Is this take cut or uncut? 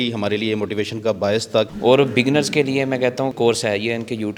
cut